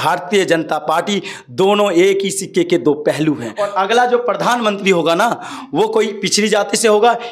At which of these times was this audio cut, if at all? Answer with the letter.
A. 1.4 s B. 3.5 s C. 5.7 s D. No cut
B